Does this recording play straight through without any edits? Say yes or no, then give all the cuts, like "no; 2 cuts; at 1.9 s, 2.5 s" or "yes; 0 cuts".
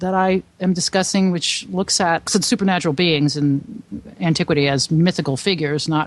no; 1 cut; at 2.3 s